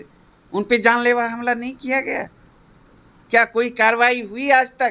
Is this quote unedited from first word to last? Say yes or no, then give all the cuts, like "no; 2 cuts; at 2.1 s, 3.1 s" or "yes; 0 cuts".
yes; 0 cuts